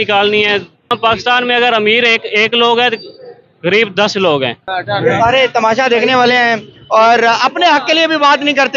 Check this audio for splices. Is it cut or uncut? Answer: cut